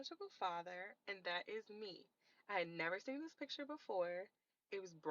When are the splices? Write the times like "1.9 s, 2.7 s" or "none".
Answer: none